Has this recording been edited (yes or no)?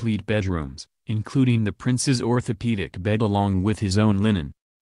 yes